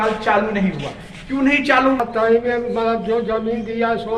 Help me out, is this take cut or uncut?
cut